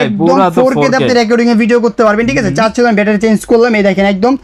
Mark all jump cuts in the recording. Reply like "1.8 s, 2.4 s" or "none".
none